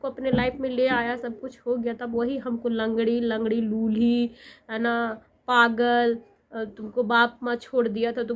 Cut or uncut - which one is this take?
uncut